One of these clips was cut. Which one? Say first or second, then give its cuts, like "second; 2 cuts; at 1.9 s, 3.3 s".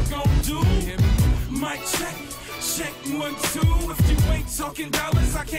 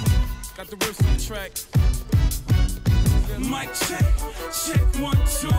second; 1 cut; at 3.3 s